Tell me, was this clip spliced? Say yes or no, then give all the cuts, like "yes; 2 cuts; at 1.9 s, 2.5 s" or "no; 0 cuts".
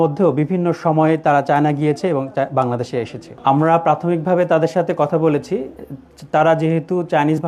yes; 1 cut; at 3.2 s